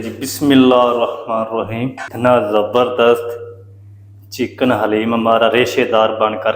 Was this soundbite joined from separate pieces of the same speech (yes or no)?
yes